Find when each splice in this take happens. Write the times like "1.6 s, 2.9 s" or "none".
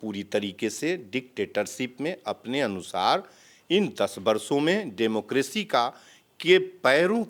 none